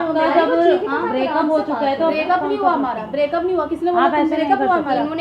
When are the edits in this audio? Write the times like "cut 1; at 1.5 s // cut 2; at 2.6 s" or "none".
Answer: none